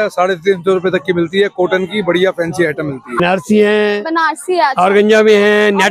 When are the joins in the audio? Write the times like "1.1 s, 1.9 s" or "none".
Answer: 3.2 s